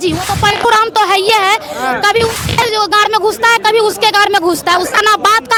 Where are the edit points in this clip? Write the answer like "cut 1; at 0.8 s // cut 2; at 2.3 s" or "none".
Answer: none